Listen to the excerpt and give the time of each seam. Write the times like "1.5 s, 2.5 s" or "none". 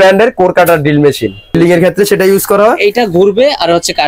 1.5 s

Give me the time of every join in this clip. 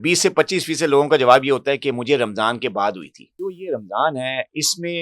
3.4 s

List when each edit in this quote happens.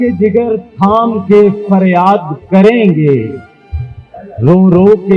none

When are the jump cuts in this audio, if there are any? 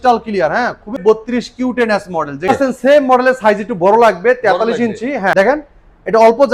1.0 s, 2.5 s, 5.3 s

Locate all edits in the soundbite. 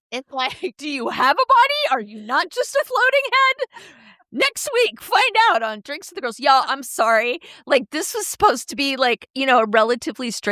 none

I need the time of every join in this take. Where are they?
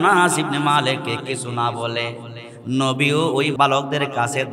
3.5 s

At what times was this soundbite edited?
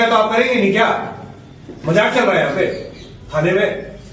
2.2 s

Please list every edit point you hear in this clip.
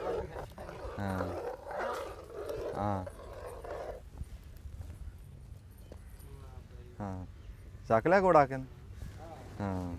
none

